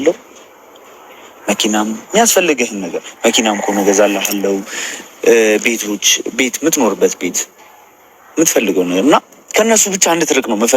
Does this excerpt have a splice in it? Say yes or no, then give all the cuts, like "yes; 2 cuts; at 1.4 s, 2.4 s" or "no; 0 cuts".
no; 0 cuts